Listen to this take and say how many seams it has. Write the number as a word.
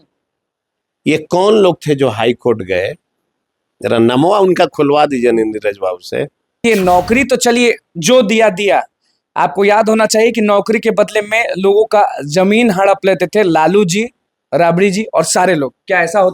one